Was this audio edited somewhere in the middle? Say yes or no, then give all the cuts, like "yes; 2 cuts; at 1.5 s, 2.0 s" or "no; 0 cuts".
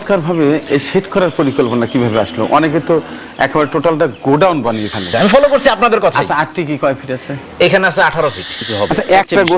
yes; 2 cuts; at 5.3 s, 8.6 s